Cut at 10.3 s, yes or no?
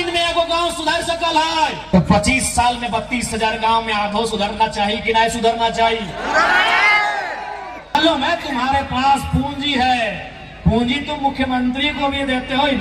no